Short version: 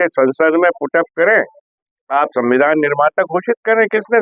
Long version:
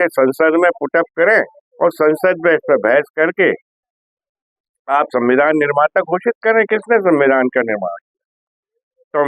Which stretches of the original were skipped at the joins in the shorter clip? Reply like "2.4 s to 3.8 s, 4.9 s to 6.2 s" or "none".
1.6 s to 4.4 s